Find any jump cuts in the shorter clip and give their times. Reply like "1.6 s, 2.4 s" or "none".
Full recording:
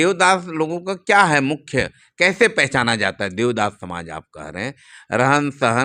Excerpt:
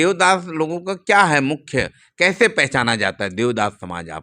none